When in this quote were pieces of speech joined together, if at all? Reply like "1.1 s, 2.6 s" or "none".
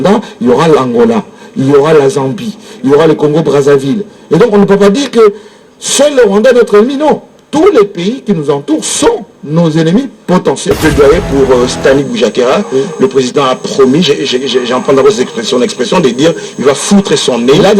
10.7 s

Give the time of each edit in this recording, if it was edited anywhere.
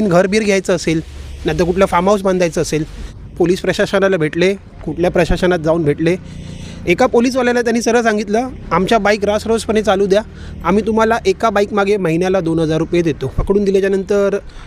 3.1 s, 13.3 s

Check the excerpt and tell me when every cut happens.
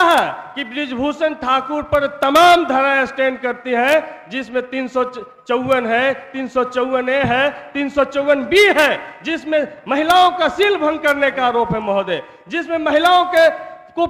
none

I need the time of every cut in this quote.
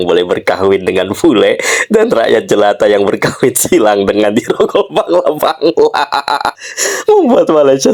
none

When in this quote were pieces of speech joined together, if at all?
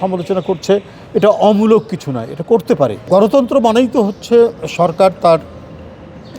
3.0 s

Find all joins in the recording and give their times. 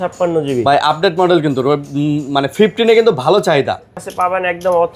4.0 s

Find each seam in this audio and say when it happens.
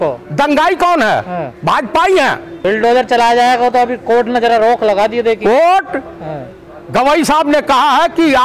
none

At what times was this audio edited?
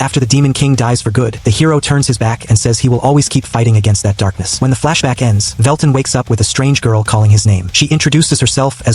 1.4 s, 4.4 s, 5.5 s, 7.7 s

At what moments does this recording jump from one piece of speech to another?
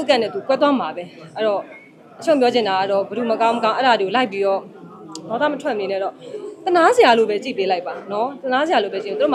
none

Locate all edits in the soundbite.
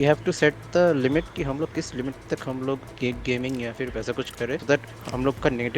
4.6 s

